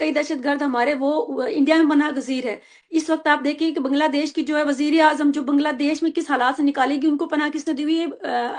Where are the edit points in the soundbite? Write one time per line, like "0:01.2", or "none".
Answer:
none